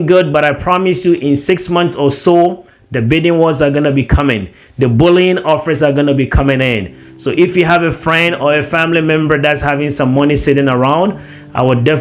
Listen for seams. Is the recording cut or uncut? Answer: uncut